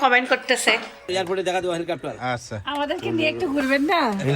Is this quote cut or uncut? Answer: cut